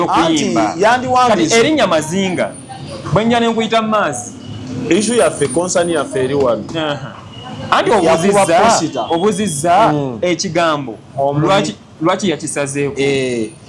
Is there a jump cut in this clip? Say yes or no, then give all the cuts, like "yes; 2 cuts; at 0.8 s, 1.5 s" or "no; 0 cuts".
no; 0 cuts